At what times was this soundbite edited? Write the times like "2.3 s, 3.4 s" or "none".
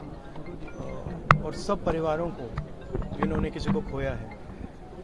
none